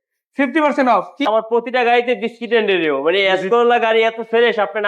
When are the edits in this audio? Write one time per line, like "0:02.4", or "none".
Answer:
0:01.2